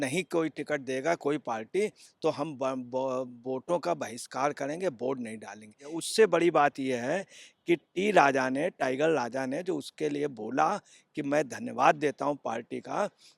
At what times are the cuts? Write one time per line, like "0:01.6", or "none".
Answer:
0:06.0